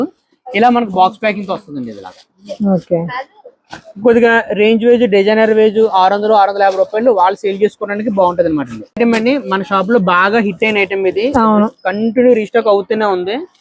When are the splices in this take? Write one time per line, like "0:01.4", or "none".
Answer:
0:08.8